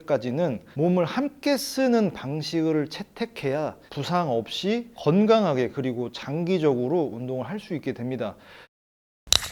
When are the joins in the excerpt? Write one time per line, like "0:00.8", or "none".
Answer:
0:08.5